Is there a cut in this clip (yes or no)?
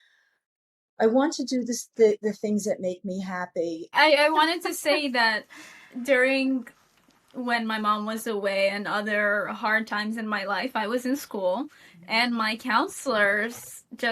yes